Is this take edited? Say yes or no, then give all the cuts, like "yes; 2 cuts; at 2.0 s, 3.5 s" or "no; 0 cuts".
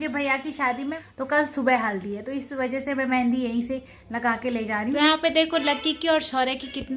yes; 2 cuts; at 0.9 s, 5.0 s